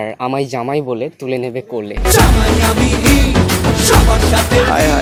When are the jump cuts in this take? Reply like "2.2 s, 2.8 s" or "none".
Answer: none